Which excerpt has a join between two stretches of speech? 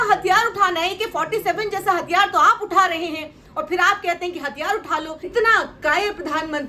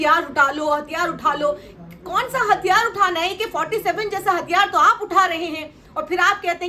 first; 1 cut; at 5.2 s

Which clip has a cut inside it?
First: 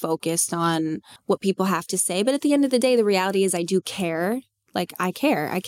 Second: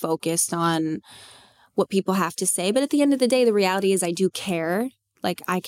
first; 1 cut; at 1.1 s

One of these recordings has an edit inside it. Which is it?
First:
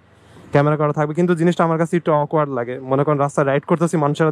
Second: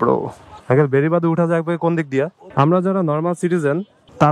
second; 1 cut; at 2.4 s

